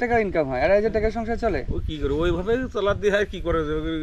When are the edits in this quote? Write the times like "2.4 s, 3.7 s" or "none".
none